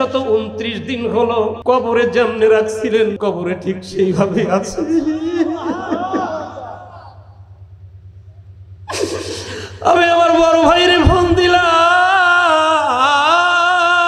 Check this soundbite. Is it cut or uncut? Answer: cut